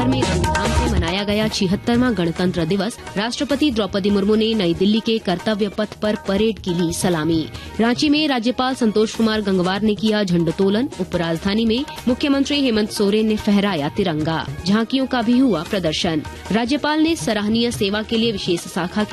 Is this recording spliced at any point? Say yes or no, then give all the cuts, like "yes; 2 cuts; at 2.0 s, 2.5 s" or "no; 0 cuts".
yes; 5 cuts; at 3.0 s, 7.6 s, 11.9 s, 14.5 s, 16.3 s